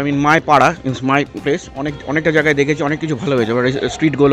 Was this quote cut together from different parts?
no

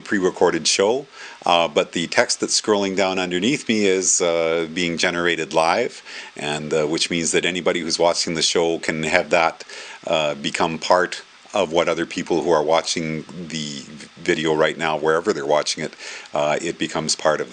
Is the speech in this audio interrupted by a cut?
yes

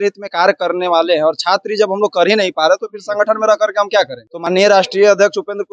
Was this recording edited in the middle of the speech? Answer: yes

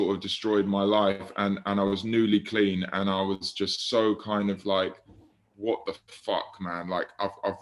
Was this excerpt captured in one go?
yes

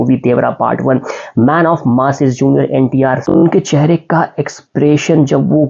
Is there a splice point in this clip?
yes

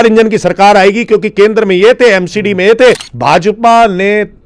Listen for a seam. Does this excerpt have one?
yes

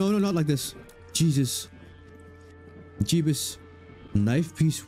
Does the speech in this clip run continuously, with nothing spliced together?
yes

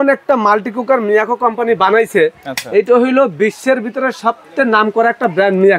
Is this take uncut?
yes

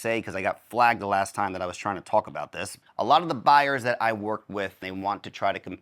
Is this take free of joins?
no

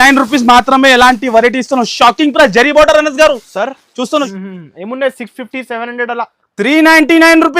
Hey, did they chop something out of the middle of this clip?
yes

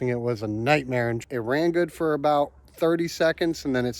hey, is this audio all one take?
no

